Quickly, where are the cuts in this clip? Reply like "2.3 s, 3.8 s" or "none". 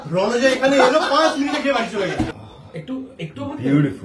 2.3 s